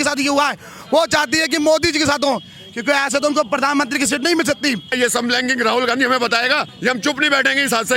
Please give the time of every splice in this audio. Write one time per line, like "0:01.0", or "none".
0:04.9
0:06.7